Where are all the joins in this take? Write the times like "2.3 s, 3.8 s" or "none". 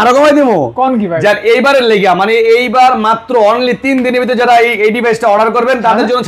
none